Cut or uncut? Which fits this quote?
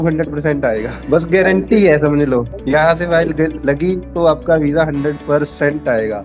cut